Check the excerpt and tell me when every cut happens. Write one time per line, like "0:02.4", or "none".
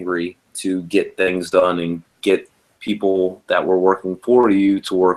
none